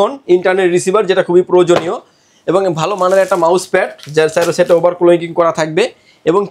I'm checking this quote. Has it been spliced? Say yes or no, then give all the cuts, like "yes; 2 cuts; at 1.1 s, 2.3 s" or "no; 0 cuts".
no; 0 cuts